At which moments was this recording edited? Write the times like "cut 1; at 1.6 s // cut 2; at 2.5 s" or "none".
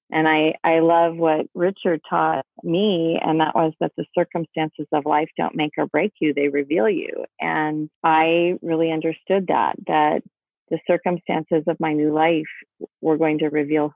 cut 1; at 7.9 s